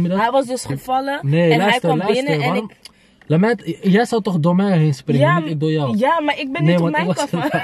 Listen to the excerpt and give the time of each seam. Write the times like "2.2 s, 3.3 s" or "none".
none